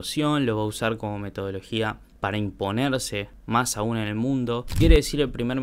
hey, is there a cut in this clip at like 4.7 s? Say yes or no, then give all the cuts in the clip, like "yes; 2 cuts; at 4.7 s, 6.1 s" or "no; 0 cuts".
yes; 1 cut; at 4.7 s